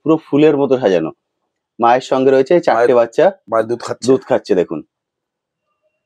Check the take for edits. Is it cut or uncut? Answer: uncut